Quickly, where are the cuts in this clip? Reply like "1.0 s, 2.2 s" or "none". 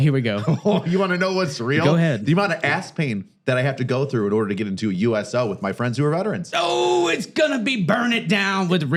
none